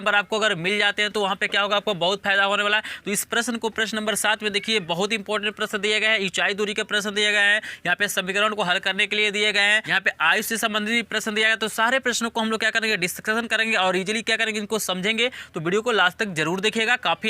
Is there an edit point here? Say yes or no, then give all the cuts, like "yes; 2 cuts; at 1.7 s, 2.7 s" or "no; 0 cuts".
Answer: yes; 1 cut; at 10.1 s